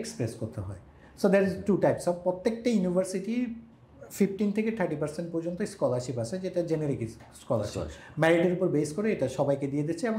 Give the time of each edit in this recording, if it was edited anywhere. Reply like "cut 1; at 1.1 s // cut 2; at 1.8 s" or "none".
none